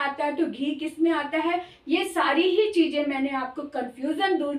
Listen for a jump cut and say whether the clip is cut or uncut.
uncut